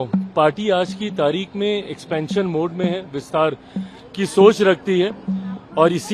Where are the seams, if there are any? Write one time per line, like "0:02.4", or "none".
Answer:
none